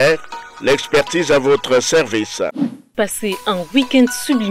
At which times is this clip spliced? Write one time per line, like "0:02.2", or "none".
0:02.9